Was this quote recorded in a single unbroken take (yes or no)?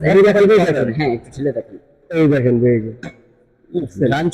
yes